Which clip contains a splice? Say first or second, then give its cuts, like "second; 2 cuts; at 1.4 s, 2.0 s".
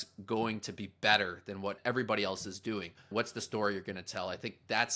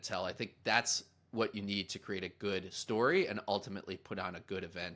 first; 2 cuts; at 1.8 s, 3.1 s